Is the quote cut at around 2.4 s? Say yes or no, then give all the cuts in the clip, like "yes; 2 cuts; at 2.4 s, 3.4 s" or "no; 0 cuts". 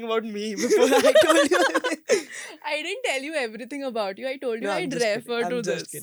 no; 0 cuts